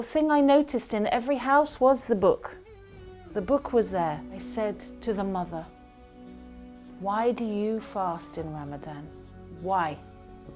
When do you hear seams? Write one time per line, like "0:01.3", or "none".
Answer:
0:04.3